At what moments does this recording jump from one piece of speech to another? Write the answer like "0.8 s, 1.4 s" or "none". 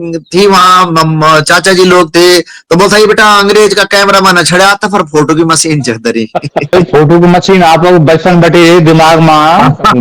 6.7 s